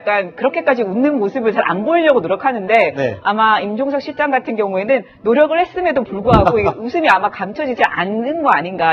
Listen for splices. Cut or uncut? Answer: cut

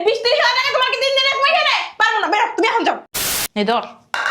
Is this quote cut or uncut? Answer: cut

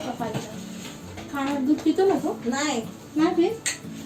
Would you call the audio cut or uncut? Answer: uncut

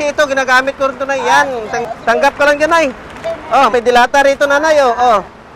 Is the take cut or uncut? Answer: cut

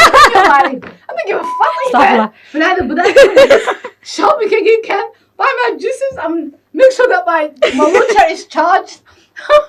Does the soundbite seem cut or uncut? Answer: uncut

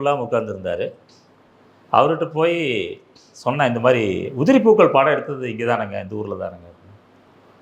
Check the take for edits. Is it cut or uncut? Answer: uncut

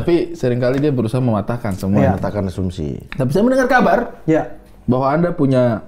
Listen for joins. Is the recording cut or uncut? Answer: uncut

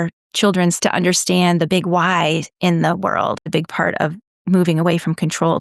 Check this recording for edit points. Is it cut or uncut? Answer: cut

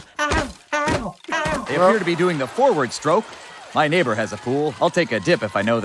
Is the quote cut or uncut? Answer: cut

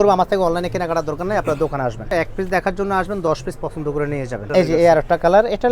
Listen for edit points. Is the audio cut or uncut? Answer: cut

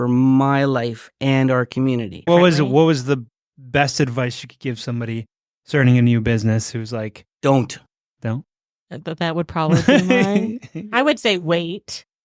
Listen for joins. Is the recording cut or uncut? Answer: cut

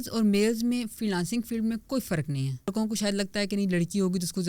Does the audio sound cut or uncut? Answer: cut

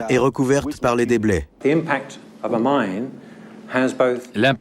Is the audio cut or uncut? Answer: cut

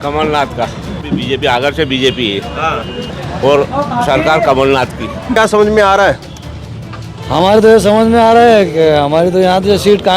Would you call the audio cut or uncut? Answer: cut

